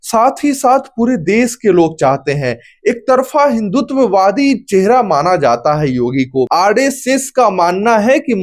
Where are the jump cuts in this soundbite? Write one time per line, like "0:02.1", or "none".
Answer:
0:06.5